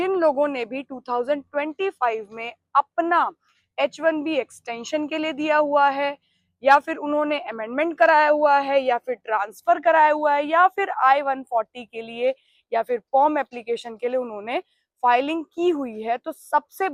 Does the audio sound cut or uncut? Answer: uncut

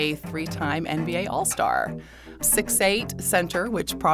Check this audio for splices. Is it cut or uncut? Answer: cut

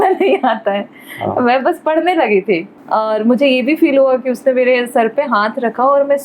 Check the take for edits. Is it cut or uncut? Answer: cut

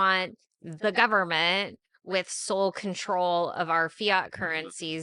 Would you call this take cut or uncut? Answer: uncut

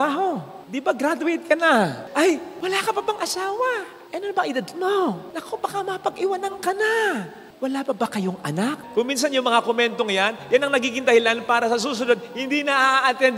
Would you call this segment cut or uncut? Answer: cut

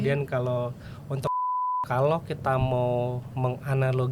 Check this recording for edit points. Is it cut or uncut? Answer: cut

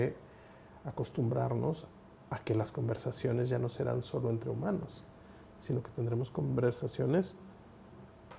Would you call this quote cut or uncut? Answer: uncut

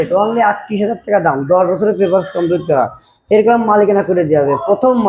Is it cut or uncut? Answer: uncut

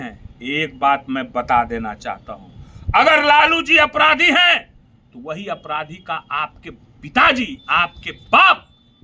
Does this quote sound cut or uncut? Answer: uncut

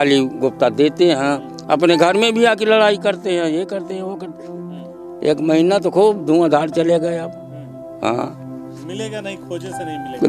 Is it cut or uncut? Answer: uncut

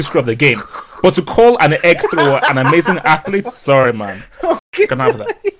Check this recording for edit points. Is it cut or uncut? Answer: cut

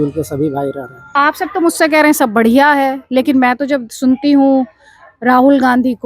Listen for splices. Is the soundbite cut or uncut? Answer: cut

